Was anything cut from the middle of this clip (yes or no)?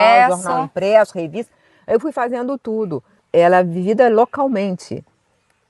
yes